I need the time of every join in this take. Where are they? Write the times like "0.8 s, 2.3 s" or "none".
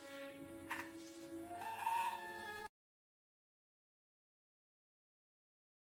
none